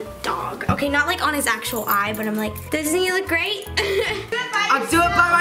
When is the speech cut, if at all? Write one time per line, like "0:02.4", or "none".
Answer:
0:04.3